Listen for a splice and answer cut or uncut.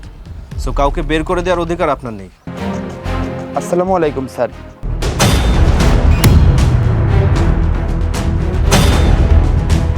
cut